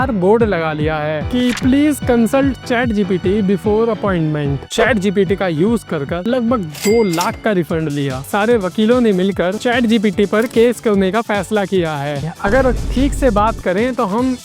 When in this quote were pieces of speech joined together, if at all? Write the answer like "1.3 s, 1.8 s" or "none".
4.7 s, 8.3 s, 12.2 s